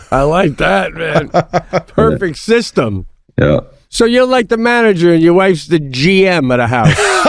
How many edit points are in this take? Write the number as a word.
two